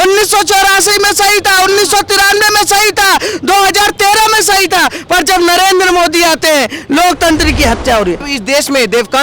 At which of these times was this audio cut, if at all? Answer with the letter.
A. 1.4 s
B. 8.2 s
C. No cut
B